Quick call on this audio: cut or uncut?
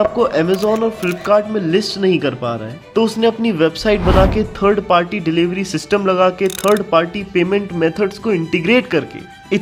uncut